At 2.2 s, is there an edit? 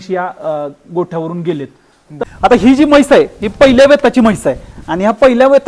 yes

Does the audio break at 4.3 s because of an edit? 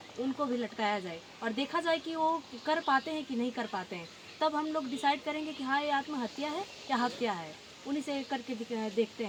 no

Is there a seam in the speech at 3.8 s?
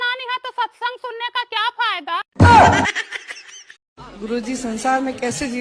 yes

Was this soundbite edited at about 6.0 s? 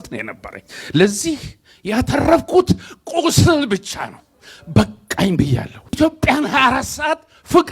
yes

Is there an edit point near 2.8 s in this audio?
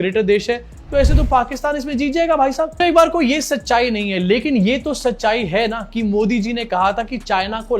no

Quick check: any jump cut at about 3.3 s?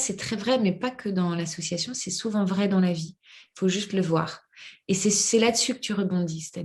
no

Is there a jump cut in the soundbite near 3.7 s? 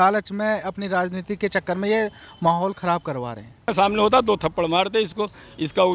yes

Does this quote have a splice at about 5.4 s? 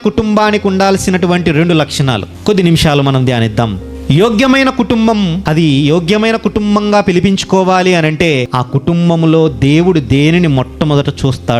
yes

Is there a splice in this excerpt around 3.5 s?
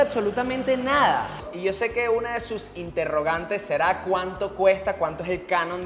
no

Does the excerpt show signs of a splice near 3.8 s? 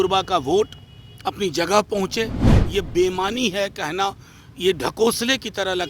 no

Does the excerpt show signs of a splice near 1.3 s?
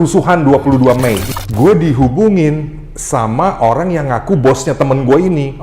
yes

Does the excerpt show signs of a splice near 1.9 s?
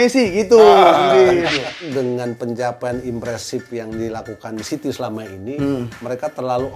yes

